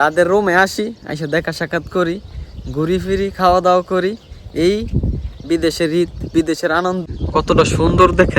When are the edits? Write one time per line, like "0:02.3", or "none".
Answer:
0:07.1